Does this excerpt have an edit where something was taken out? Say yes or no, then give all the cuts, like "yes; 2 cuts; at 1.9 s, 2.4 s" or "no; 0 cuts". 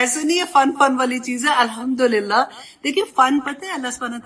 no; 0 cuts